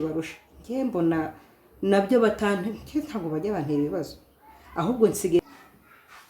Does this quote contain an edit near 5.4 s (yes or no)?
yes